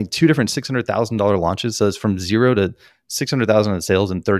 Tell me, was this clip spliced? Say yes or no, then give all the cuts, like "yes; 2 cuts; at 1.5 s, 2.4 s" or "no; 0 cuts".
no; 0 cuts